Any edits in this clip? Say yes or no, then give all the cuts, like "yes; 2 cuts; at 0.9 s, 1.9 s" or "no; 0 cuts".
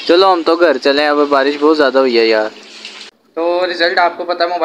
yes; 1 cut; at 3.2 s